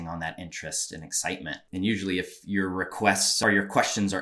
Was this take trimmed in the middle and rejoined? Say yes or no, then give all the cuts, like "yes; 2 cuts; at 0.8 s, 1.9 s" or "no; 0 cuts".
yes; 2 cuts; at 1.6 s, 3.3 s